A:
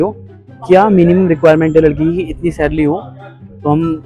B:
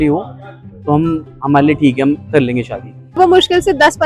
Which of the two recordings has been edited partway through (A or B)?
B